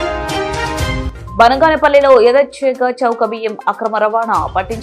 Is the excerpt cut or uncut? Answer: cut